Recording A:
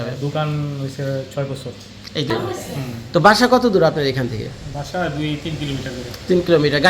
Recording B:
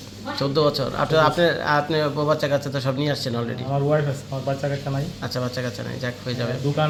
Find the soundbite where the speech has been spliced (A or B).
A